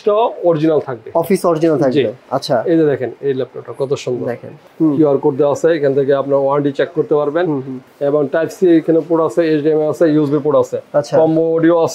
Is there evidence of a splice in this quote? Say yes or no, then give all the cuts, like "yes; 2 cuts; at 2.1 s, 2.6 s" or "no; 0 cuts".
yes; 2 cuts; at 4.7 s, 7.9 s